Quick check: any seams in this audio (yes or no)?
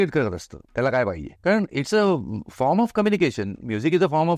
yes